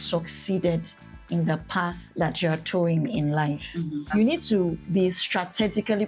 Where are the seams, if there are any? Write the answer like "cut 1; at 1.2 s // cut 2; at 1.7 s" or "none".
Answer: cut 1; at 4.1 s